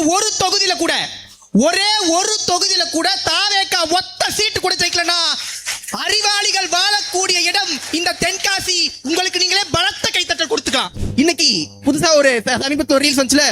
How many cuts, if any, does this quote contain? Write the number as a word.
one